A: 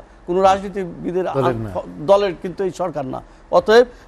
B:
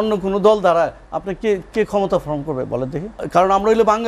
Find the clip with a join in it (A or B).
B